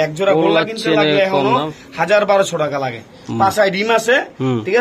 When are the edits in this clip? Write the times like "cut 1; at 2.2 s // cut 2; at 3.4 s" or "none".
none